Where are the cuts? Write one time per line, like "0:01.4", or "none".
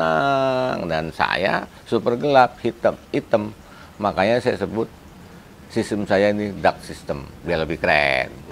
none